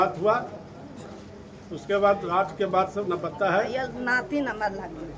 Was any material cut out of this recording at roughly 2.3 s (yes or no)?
no